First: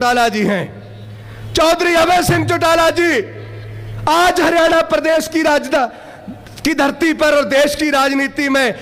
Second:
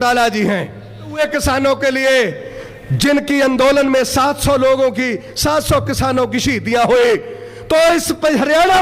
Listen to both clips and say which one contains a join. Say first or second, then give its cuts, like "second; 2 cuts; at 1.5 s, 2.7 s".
second; 1 cut; at 1.2 s